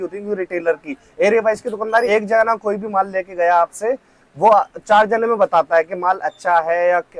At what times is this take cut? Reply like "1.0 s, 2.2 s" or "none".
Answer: none